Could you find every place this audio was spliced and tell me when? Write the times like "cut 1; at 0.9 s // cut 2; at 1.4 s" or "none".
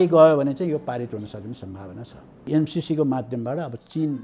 cut 1; at 2.5 s